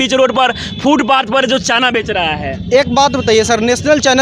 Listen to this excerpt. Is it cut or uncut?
uncut